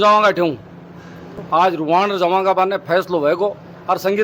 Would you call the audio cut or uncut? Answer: cut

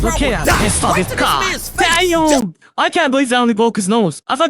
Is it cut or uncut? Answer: uncut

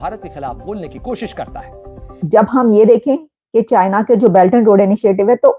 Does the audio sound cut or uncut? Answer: cut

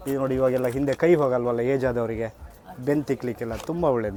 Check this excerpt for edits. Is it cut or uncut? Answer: uncut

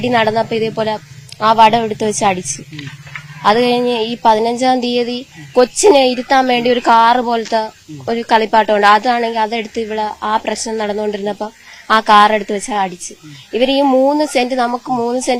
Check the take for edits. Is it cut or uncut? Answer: uncut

